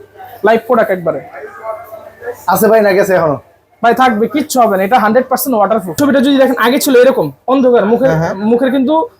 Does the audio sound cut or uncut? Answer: cut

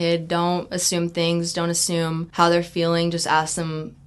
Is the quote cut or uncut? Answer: cut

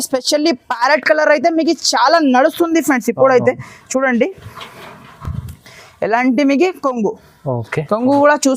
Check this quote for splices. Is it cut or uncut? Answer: uncut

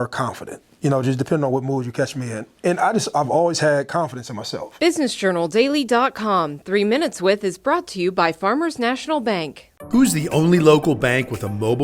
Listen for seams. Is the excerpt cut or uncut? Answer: cut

